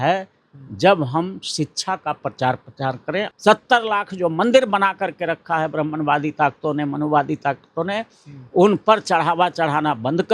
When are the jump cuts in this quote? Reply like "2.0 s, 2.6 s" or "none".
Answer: 3.3 s

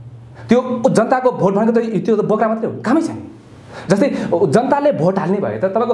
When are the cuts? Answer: none

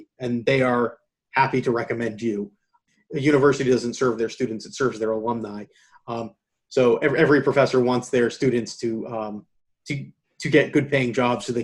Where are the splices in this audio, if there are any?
2.8 s

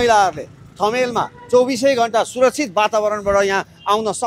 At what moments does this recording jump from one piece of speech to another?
none

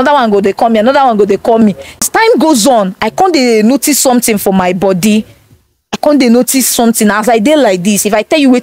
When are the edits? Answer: 2.1 s

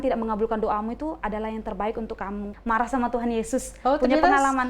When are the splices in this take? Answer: 2.5 s

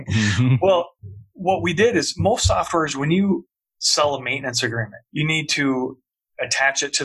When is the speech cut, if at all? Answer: 1.0 s, 5.0 s

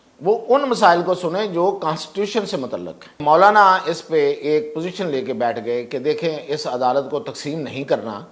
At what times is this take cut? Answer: 3.1 s

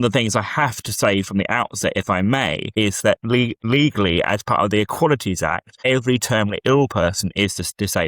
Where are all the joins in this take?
2.6 s, 3.7 s, 5.7 s

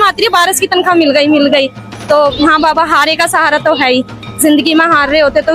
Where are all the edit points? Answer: none

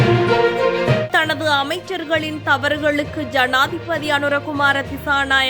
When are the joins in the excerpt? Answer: 1.1 s

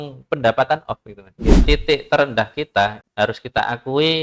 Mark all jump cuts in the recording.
1.6 s, 3.0 s

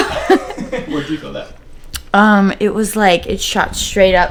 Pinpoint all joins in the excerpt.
none

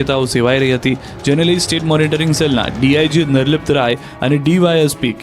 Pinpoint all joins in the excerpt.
none

